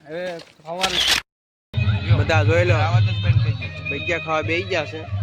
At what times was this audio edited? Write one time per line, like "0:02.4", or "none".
0:01.0

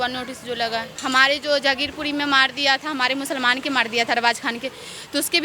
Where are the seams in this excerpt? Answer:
0:00.9

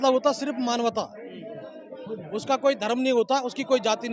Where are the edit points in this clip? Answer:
none

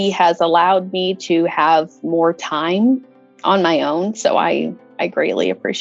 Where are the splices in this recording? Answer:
none

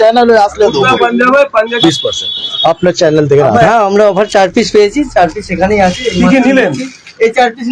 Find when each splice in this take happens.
0:01.7
0:03.6

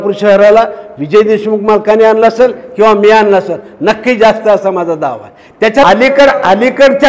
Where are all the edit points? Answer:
0:05.8

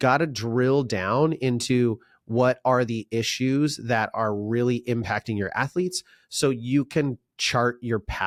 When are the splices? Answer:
none

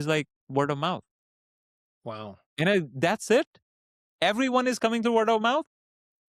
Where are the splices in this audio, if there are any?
none

